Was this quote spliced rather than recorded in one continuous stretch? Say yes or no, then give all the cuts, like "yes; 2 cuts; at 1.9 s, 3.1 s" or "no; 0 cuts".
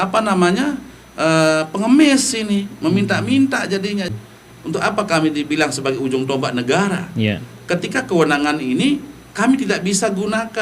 yes; 1 cut; at 4.1 s